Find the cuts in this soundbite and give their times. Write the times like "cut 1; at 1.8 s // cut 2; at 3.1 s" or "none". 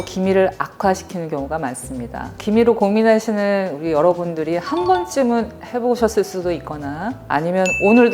cut 1; at 2.3 s